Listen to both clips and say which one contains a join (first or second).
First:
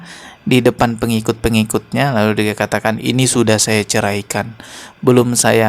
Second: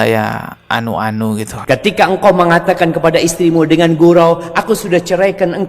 second